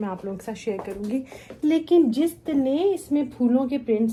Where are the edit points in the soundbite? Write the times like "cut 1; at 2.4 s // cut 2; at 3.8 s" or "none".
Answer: none